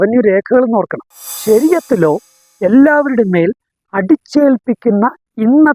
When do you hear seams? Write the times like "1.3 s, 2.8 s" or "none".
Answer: 1.2 s